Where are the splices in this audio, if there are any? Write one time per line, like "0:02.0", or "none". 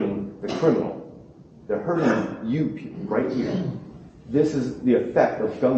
none